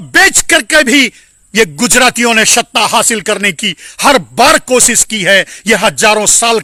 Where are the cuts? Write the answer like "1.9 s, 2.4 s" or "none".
none